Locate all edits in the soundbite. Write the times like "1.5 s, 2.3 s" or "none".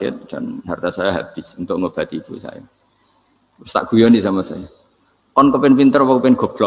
none